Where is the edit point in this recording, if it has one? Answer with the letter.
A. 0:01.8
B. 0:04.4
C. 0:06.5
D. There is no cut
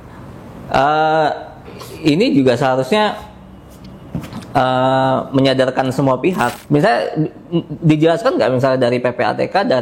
C